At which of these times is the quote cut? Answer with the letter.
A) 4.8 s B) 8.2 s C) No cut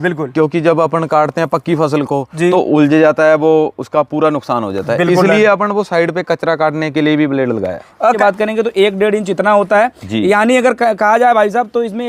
B